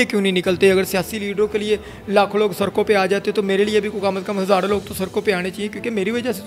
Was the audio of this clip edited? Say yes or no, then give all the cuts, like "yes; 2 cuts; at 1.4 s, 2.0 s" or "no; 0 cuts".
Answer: no; 0 cuts